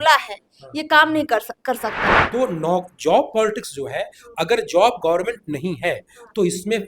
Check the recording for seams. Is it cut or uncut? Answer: cut